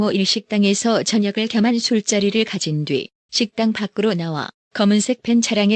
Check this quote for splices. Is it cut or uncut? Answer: uncut